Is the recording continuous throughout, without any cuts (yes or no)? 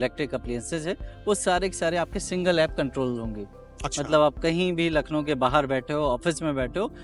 yes